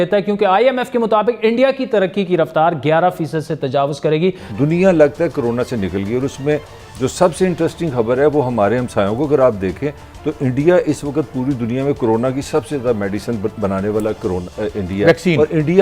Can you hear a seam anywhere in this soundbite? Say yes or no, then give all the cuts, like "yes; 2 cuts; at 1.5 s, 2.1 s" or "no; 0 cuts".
yes; 1 cut; at 4.5 s